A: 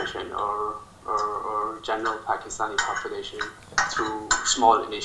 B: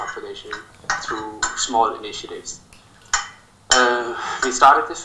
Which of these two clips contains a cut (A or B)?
A